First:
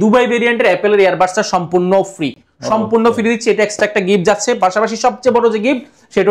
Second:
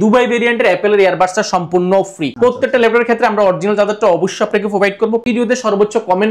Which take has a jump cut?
second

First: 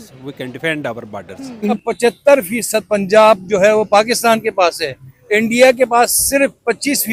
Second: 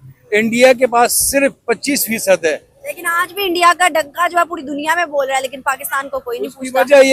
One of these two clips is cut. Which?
first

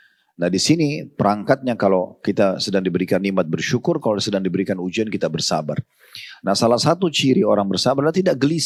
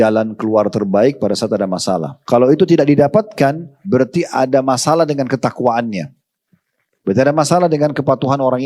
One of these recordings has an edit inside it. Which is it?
second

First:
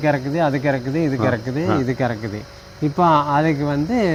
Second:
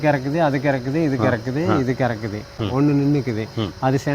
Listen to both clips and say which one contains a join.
second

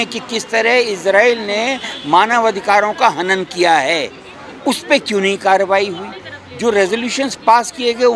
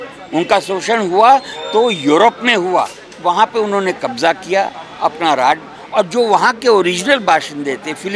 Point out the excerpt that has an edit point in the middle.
second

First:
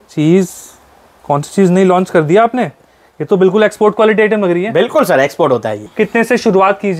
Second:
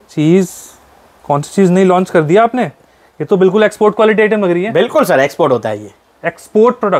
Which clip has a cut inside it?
first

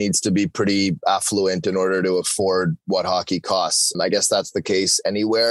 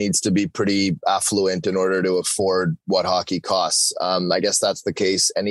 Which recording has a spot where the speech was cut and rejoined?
first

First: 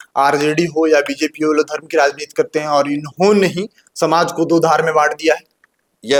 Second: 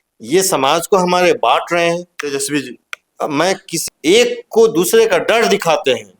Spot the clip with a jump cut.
second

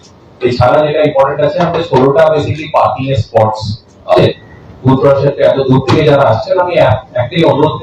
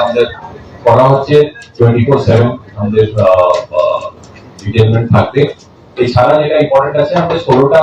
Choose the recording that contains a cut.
first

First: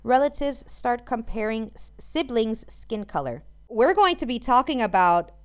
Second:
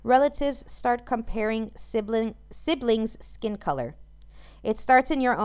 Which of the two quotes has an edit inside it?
first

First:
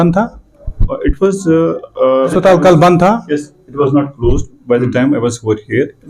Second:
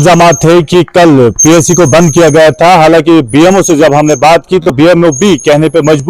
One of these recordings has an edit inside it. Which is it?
first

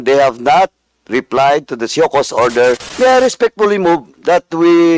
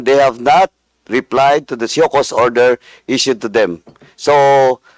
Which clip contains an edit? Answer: first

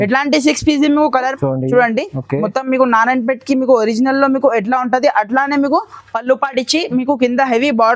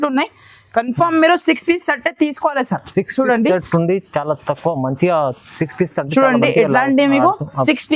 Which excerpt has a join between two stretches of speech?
first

